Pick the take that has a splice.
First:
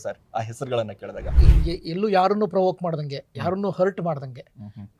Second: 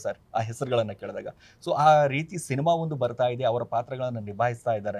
first; 1 cut; at 1.5 s

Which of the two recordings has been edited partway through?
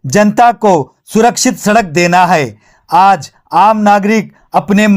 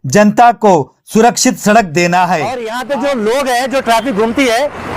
second; 1 cut; at 2.7 s

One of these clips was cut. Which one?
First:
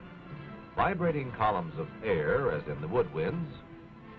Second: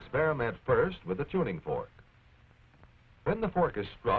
first; 1 cut; at 1.3 s

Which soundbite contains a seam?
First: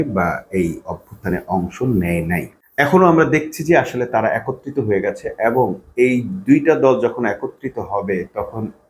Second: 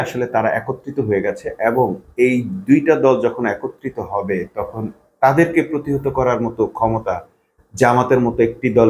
first; 1 cut; at 2.6 s

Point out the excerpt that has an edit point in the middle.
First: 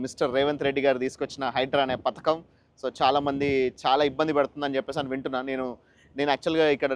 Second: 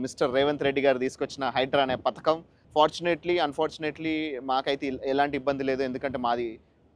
second; 1 cut; at 2.5 s

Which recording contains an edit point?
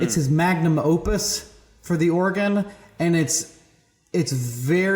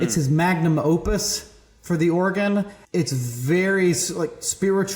second; 1 cut; at 2.8 s

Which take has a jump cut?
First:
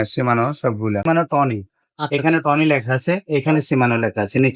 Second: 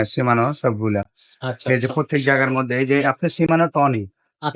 first; 1 cut; at 1.0 s

